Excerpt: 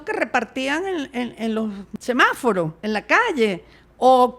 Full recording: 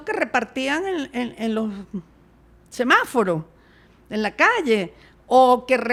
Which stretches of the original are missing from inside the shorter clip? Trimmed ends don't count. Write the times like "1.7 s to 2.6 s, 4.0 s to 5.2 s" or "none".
1.9 s to 2.6 s, 3.5 s to 4.0 s